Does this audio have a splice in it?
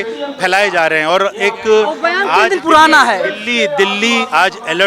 no; 0 cuts

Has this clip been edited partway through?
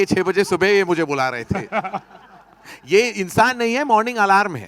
no; 0 cuts

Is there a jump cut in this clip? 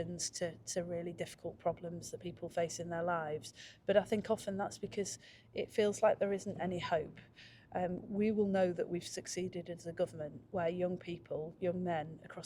no; 0 cuts

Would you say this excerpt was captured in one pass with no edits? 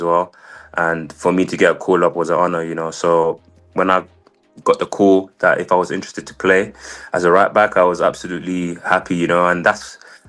yes; 0 cuts

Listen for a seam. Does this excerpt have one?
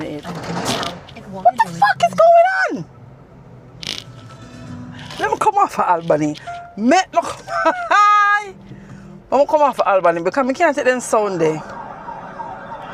no; 0 cuts

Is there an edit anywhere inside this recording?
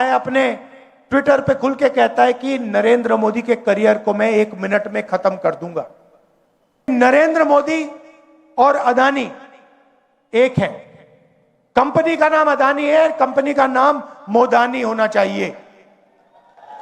yes; 1 cut; at 6.9 s

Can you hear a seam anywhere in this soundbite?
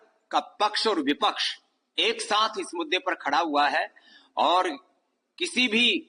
no; 0 cuts

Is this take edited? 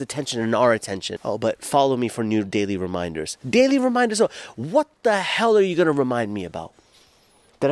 yes; 1 cut; at 1.1 s

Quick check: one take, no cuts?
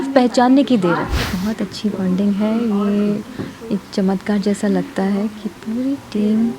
no; 1 cut; at 1.3 s

